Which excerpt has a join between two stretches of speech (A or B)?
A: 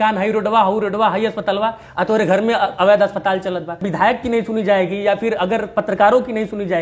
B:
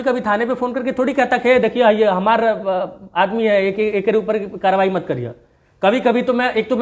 A